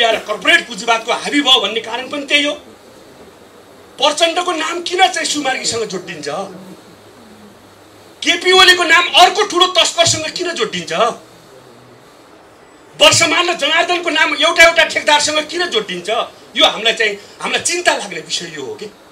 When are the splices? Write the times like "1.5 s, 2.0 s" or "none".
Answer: none